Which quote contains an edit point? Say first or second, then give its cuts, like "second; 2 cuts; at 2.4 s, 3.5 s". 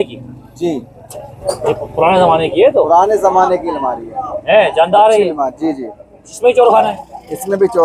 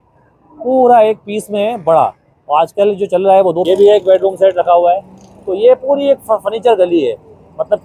second; 1 cut; at 3.6 s